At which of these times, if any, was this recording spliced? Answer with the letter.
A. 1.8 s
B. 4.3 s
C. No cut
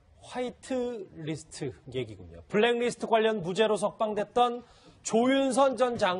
C